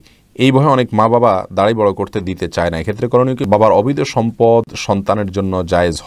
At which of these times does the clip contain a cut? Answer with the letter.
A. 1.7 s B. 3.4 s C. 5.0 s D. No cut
B